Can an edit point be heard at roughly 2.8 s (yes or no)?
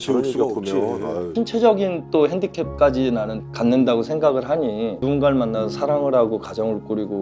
no